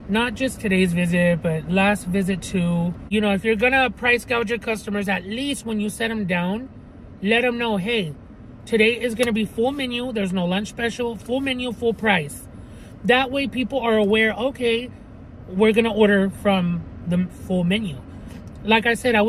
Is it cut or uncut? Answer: cut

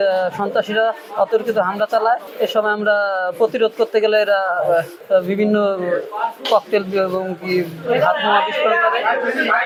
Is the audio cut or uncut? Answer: uncut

